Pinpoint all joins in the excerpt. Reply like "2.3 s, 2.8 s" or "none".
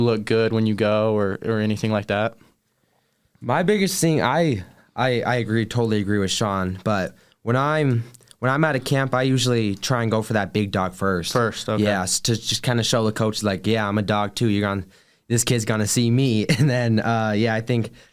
none